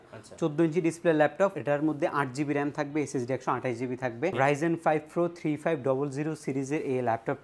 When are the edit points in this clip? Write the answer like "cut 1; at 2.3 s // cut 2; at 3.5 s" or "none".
cut 1; at 1.6 s // cut 2; at 4.3 s